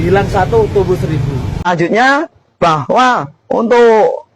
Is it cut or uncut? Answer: cut